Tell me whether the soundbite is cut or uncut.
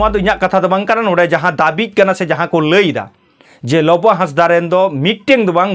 uncut